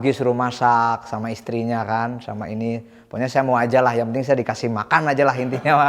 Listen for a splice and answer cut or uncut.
uncut